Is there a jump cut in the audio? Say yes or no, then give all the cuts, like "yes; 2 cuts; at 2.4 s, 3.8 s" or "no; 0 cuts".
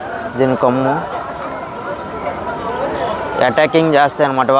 no; 0 cuts